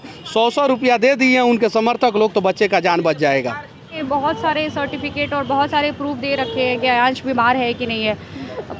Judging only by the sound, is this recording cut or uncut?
cut